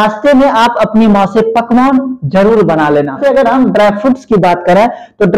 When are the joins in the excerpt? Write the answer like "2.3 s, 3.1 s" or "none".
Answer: 3.2 s